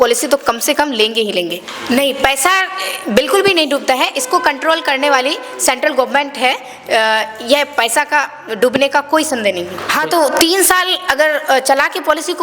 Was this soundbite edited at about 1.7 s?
yes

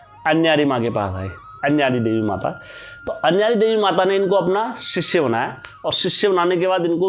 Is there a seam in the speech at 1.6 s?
no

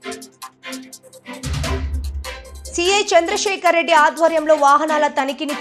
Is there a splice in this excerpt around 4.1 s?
no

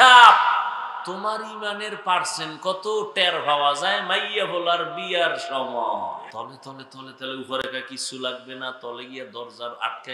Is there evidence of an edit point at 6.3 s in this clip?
yes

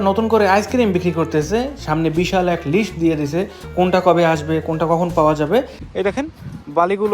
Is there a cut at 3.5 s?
no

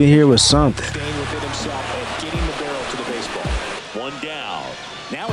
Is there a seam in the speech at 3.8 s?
yes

